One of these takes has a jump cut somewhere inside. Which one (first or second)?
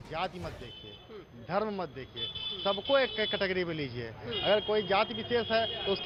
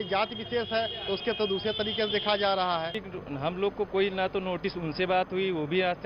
second